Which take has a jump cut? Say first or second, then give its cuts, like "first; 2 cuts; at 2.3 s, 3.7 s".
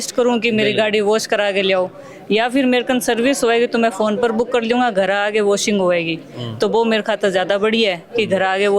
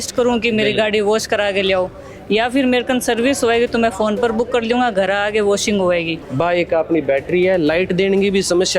second; 1 cut; at 6.2 s